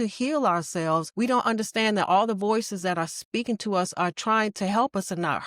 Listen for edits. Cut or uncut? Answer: cut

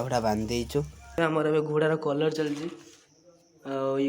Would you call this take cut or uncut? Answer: cut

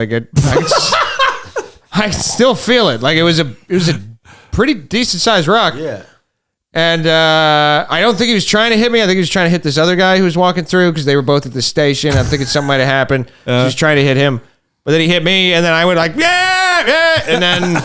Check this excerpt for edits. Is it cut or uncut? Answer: uncut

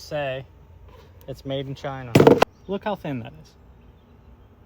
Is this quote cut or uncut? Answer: cut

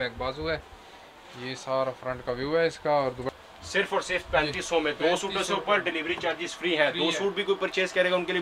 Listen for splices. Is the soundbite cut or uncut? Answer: cut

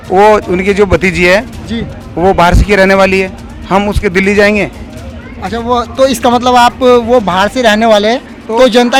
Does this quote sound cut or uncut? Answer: uncut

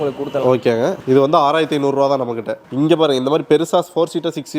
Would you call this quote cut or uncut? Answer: uncut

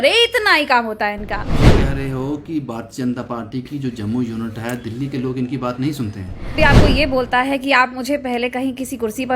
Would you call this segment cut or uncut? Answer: cut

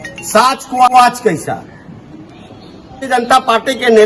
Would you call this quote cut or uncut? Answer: cut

